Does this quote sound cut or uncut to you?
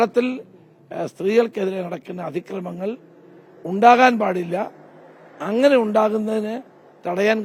uncut